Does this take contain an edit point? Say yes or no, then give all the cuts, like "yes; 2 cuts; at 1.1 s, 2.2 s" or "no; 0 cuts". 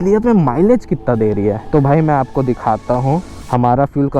yes; 2 cuts; at 1.6 s, 3.4 s